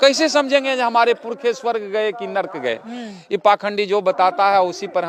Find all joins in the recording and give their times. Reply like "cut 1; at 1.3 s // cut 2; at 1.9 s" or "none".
none